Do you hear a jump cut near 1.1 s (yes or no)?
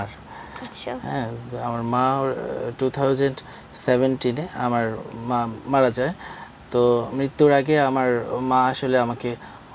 no